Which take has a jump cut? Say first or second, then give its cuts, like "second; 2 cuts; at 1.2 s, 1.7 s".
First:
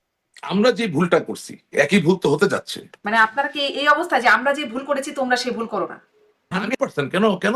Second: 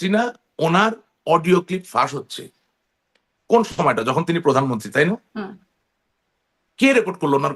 first; 2 cuts; at 3.0 s, 6.5 s